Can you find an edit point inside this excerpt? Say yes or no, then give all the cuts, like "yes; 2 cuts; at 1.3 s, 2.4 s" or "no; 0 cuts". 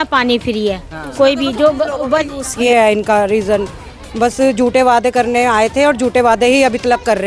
yes; 1 cut; at 2.4 s